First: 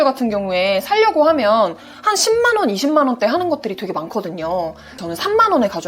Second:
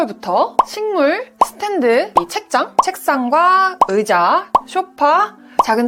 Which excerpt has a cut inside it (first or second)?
first